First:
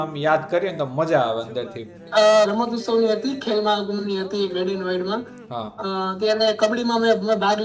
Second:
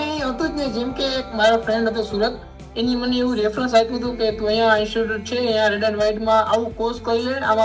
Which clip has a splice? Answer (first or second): first